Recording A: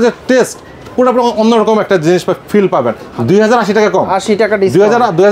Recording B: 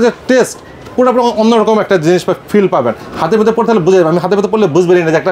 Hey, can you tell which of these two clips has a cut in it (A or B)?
A